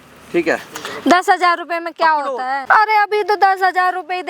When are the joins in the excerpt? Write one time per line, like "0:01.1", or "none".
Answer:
0:02.6